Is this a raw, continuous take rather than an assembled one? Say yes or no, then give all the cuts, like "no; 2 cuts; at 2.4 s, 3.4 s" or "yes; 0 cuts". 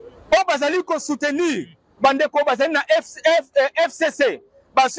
yes; 0 cuts